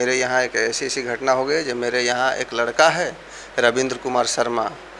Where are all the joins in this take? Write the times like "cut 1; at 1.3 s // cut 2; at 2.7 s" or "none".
none